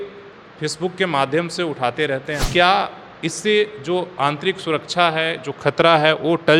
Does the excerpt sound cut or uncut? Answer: cut